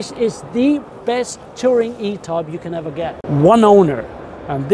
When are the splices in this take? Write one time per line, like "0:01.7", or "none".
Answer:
0:03.2